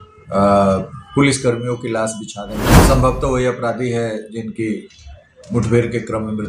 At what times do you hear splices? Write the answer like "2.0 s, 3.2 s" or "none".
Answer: 2.7 s